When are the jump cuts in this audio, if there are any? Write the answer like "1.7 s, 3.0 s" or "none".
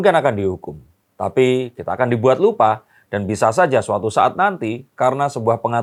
none